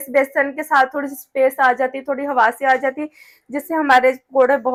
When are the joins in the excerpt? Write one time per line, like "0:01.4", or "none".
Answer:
none